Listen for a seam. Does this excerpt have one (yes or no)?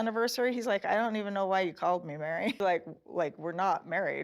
yes